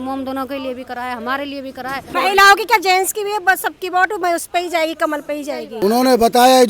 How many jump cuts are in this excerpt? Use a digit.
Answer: 2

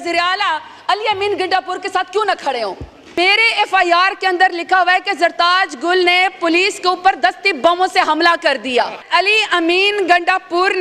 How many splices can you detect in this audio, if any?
2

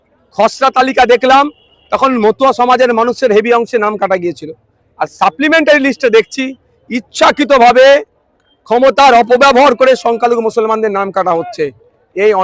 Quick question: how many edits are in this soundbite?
0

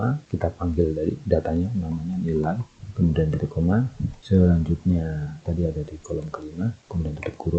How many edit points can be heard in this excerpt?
0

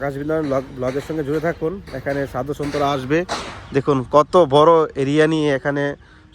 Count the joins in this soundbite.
0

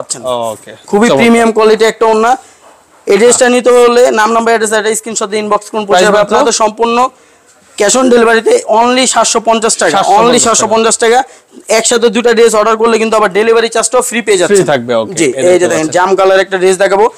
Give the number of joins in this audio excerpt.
0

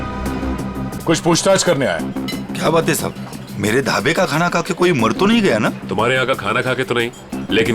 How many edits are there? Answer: 1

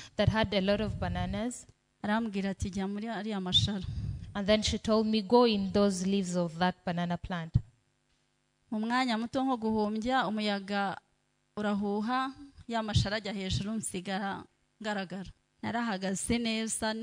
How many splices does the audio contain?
1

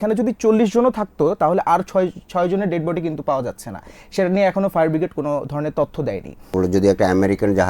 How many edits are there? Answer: 1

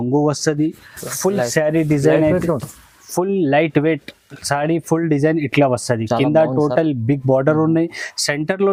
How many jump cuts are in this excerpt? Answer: 0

